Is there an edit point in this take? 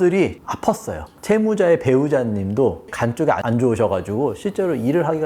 yes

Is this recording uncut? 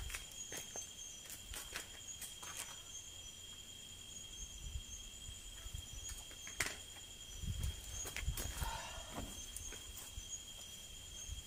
yes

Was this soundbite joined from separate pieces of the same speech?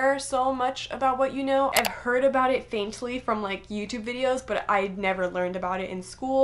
yes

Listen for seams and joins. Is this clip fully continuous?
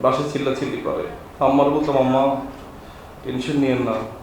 no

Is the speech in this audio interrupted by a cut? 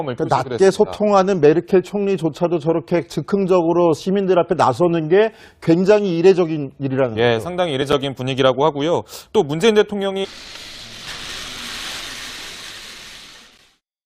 no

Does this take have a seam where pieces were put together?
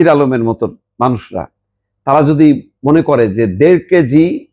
no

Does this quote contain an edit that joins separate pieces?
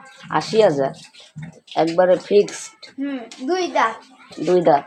no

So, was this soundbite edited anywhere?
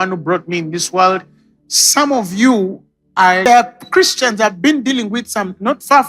yes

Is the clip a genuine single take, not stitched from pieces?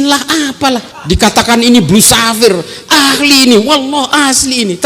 no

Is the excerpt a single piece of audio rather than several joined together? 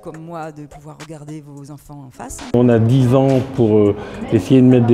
no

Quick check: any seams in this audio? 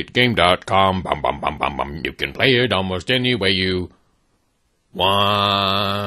yes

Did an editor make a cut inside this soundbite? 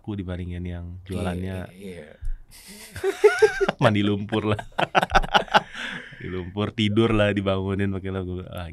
no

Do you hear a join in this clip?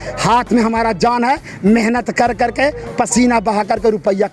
no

